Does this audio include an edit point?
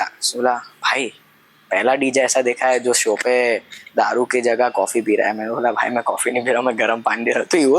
no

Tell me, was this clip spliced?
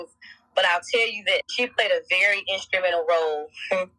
yes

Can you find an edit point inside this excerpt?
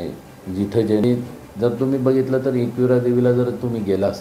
yes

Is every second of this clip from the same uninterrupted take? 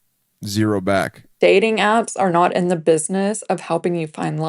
no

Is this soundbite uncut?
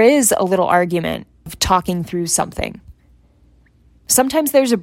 no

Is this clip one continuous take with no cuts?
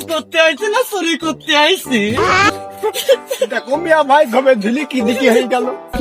yes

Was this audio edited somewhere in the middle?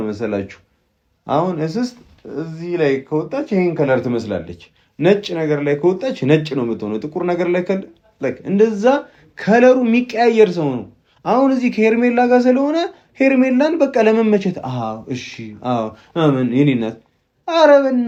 no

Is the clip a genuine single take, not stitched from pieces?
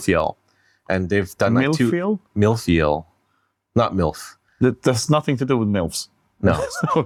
yes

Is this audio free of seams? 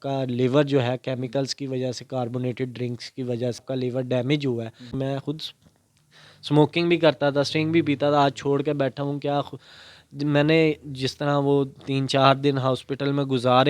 no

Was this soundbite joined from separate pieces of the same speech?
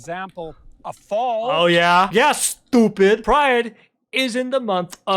yes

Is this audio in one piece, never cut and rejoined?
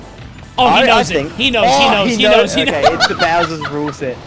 yes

